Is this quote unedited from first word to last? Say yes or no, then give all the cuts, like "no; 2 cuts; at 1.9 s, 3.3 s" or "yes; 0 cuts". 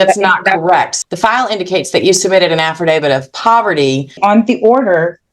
no; 2 cuts; at 0.9 s, 4.2 s